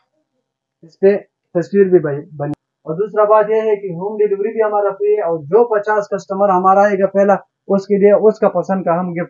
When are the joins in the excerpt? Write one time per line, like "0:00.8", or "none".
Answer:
0:02.6